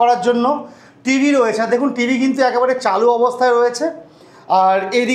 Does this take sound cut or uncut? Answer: uncut